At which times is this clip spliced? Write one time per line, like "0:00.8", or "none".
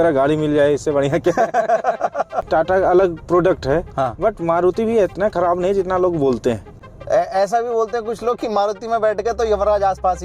0:02.4
0:06.8